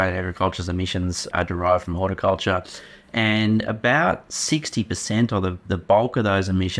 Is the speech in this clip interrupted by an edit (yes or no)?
yes